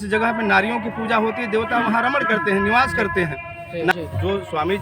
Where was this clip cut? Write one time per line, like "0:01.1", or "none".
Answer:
0:03.9